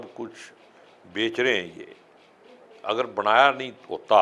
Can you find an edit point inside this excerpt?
no; 0 cuts

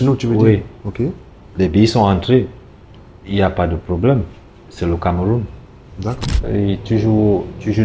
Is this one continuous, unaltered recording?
no; 1 cut; at 6.3 s

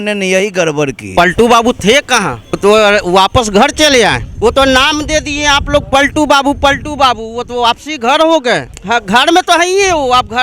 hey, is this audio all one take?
no; 4 cuts; at 1.1 s, 2.4 s, 4.3 s, 8.7 s

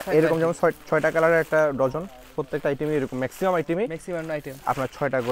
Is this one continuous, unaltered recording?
yes; 0 cuts

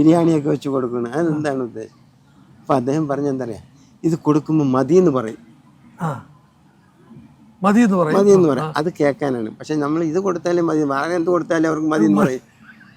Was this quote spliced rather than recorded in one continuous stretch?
no; 0 cuts

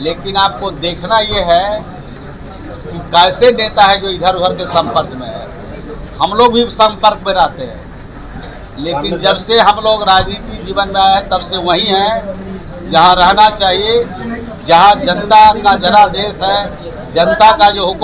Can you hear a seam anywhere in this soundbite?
no; 0 cuts

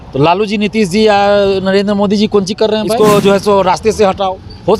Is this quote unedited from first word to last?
no; 1 cut; at 2.9 s

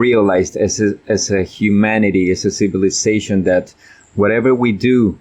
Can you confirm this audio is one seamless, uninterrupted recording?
yes; 0 cuts

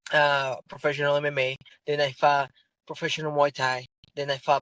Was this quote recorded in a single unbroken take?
yes; 0 cuts

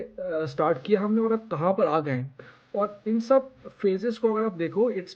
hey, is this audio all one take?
yes; 0 cuts

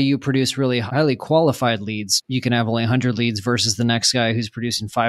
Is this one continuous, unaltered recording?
no; 2 cuts; at 0.8 s, 2.2 s

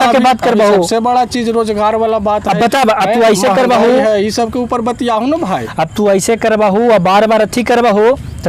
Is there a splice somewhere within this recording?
no; 0 cuts

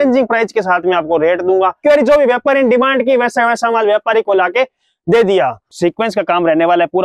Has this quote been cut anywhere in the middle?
yes; 2 cuts; at 1.8 s, 5.7 s

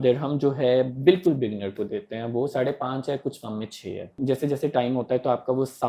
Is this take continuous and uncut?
no; 1 cut; at 4.1 s

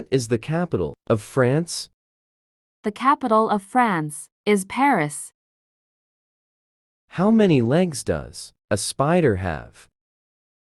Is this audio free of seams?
yes; 0 cuts

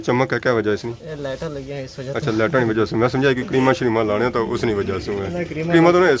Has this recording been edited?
no; 0 cuts

